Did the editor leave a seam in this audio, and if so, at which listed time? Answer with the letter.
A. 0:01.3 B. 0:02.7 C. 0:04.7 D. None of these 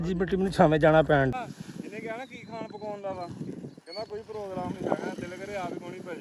A